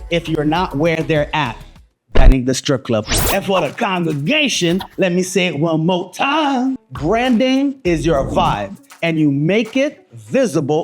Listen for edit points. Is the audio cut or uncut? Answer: cut